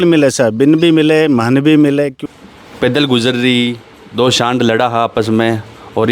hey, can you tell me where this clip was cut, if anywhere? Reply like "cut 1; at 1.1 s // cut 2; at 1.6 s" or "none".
cut 1; at 2.2 s

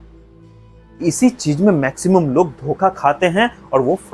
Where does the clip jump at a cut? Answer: none

